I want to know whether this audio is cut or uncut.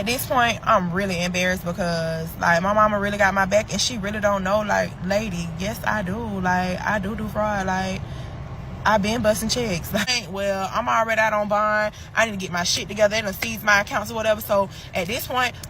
cut